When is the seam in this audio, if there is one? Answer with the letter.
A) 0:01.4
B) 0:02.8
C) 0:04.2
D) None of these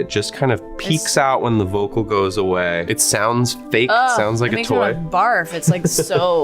B